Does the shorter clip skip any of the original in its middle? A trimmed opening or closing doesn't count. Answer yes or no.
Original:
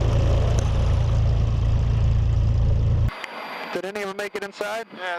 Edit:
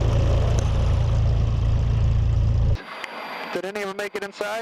yes